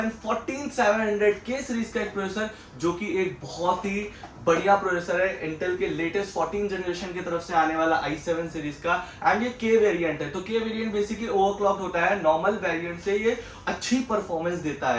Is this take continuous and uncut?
yes; 0 cuts

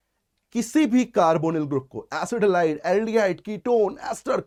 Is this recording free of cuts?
yes; 0 cuts

